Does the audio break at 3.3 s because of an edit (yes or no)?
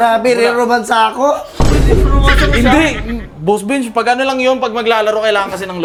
no